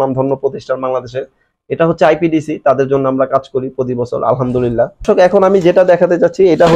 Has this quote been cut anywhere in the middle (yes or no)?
yes